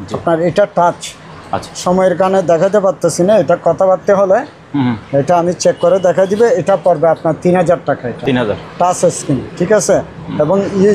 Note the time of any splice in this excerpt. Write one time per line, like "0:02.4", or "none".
none